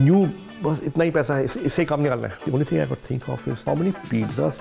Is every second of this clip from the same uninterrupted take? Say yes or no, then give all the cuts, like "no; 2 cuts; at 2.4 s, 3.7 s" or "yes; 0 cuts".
no; 2 cuts; at 2.4 s, 3.6 s